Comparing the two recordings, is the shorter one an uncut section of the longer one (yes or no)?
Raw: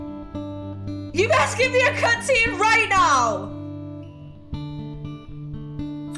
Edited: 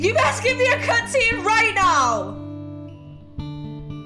yes